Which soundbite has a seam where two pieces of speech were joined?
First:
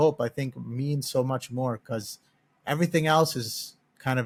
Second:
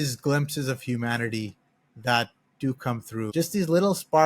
second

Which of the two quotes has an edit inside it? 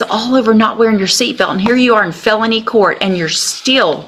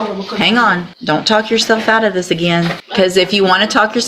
second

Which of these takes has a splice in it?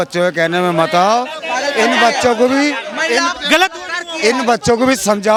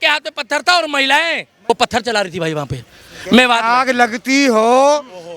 second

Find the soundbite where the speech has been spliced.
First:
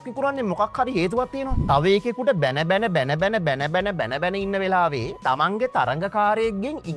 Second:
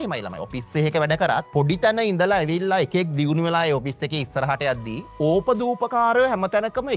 first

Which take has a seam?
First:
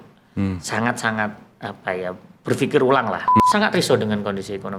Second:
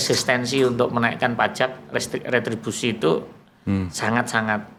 first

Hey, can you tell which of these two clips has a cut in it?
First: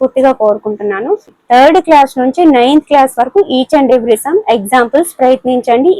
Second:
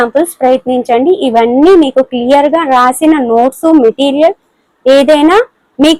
first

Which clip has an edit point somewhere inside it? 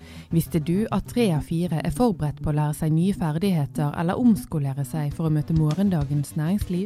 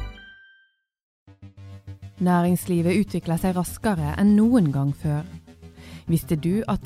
second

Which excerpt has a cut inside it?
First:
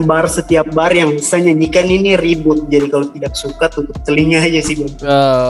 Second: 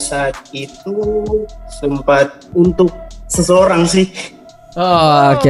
second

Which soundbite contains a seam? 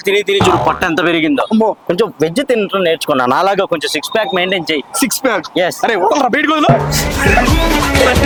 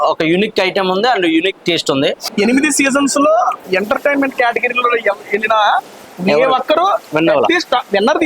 second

